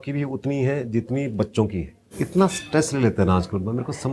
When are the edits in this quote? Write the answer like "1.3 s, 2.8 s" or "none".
2.2 s